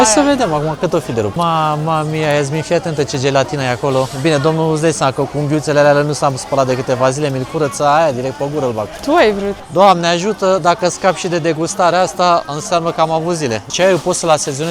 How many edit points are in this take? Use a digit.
3